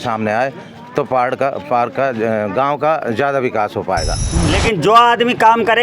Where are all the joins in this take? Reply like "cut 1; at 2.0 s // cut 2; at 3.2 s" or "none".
cut 1; at 4.2 s